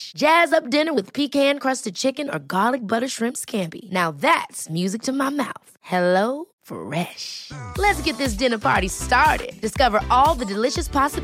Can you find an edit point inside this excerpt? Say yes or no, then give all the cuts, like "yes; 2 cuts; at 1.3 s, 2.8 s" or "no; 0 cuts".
no; 0 cuts